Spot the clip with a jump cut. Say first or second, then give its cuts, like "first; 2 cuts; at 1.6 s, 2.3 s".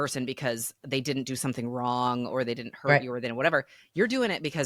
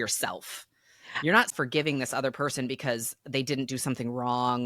second; 1 cut; at 1.4 s